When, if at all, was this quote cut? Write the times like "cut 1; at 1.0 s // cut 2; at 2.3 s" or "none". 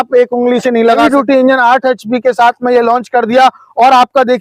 cut 1; at 1.0 s

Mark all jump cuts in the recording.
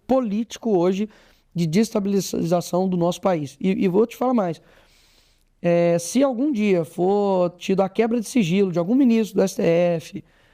none

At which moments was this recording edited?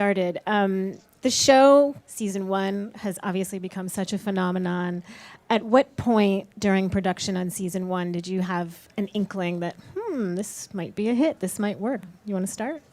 cut 1; at 1.0 s

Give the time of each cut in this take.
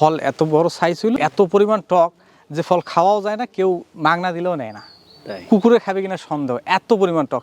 cut 1; at 1.2 s

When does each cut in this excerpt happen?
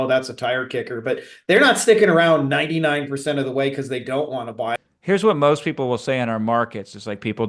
cut 1; at 4.8 s

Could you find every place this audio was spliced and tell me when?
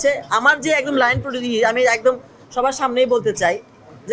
none

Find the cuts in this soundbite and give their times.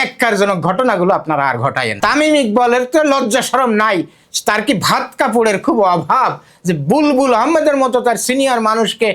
cut 1; at 1.9 s

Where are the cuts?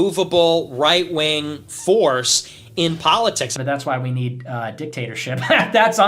cut 1; at 3.5 s

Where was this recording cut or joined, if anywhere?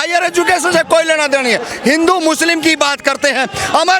cut 1; at 1.7 s

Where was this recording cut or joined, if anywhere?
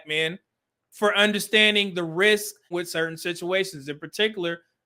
cut 1; at 2.7 s

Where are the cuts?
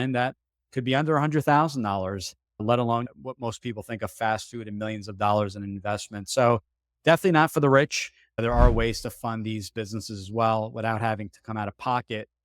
cut 1; at 8.2 s

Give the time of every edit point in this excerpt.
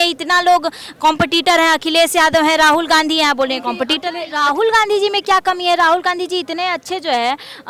cut 1; at 4.3 s

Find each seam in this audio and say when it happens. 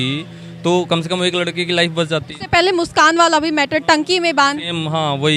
none

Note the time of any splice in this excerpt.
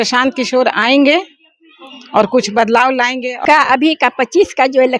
cut 1; at 3.3 s

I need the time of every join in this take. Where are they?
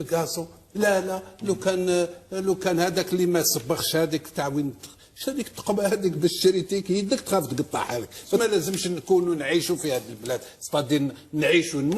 cut 1; at 8.4 s

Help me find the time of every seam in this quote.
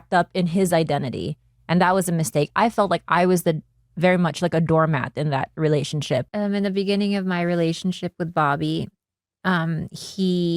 cut 1; at 6.3 s

